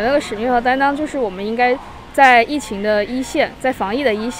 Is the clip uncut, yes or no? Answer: yes